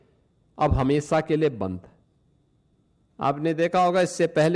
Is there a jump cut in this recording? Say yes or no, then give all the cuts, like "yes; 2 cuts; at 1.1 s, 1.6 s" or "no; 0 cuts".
no; 0 cuts